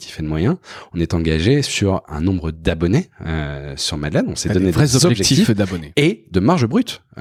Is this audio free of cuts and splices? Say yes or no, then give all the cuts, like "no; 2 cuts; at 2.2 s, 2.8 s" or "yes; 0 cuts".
yes; 0 cuts